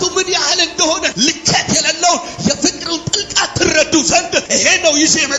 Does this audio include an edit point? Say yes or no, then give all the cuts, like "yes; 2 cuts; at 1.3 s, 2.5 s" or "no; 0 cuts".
yes; 2 cuts; at 1.1 s, 4.5 s